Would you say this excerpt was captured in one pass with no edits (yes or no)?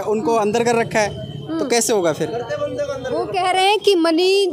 yes